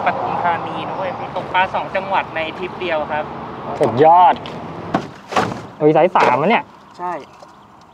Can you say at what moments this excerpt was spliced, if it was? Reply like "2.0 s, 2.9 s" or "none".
1.2 s, 4.8 s

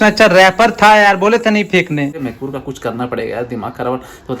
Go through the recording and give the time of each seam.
2.2 s

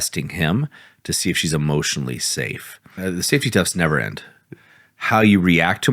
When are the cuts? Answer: 3.0 s

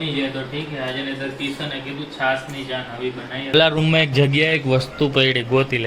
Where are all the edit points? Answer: 3.5 s

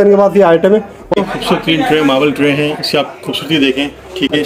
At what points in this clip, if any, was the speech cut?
1.0 s

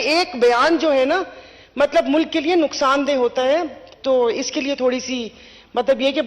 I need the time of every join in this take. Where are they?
none

